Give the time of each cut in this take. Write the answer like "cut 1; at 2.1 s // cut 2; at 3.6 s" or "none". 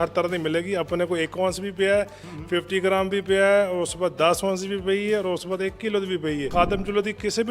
cut 1; at 6.5 s